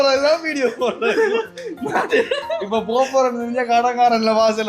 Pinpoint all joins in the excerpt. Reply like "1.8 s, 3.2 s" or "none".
none

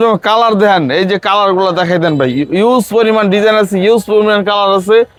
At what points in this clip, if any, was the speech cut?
none

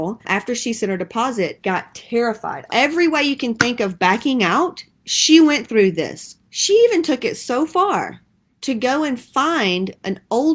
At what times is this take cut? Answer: none

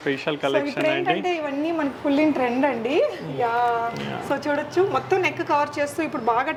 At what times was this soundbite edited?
none

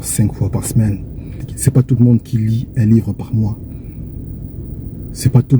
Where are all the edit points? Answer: 1.5 s

